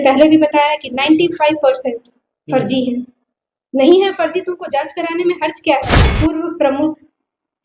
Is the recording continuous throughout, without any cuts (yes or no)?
no